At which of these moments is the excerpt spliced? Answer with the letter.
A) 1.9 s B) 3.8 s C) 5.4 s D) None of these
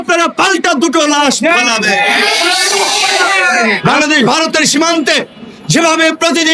B